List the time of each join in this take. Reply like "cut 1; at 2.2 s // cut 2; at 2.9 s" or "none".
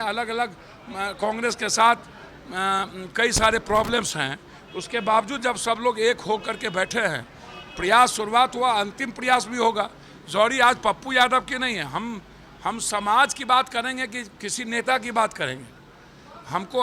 none